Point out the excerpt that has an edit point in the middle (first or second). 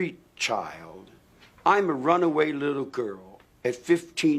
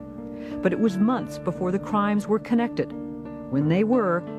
first